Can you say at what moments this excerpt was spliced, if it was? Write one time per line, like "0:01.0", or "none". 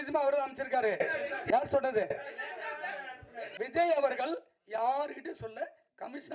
0:03.6